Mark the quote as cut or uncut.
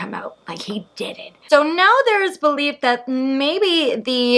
cut